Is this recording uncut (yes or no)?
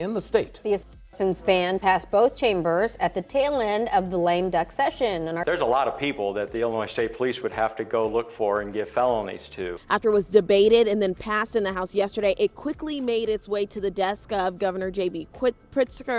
yes